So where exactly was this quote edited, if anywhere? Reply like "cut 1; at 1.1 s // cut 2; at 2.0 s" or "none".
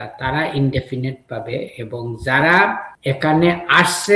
cut 1; at 2.9 s